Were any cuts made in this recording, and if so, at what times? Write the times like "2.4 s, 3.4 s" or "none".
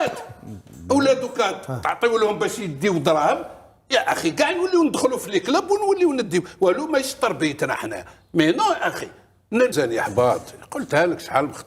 9.7 s